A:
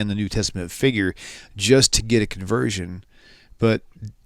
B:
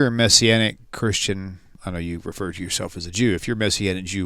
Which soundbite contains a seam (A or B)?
B